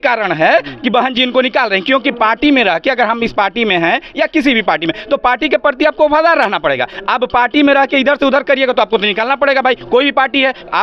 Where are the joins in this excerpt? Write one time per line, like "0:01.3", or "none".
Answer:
none